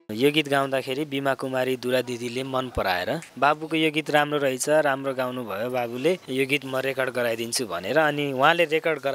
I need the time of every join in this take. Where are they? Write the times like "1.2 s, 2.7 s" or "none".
none